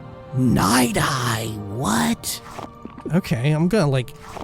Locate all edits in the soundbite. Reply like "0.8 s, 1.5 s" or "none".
2.9 s

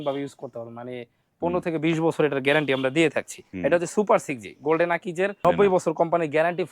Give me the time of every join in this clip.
3.4 s, 5.4 s

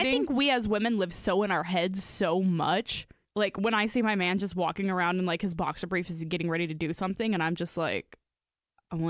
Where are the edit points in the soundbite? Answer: 3.2 s

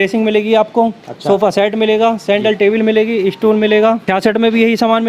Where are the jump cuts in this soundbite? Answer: 4.0 s

